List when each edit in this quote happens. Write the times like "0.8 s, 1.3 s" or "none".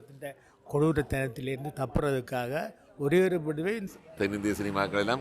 3.8 s